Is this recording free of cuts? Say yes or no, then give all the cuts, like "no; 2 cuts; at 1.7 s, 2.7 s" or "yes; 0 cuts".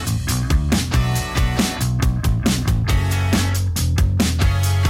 no; 1 cut; at 2.2 s